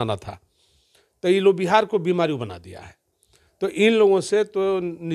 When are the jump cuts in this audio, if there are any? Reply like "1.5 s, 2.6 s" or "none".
none